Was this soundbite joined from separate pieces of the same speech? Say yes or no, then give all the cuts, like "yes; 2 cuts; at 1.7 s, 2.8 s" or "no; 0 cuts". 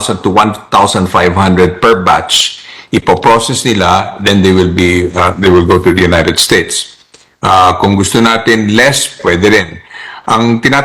no; 0 cuts